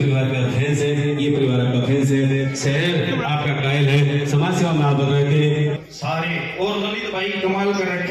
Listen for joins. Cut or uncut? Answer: cut